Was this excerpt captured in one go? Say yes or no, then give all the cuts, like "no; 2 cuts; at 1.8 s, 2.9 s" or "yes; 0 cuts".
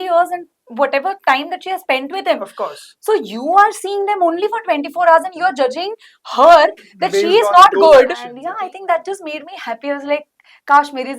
no; 1 cut; at 8.4 s